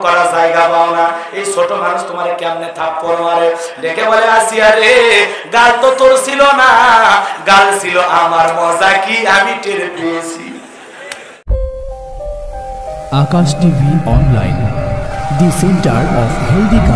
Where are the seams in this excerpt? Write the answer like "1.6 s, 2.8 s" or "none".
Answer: 11.3 s